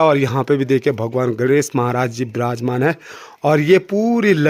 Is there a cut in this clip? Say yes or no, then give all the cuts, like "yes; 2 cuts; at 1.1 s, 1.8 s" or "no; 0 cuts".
no; 0 cuts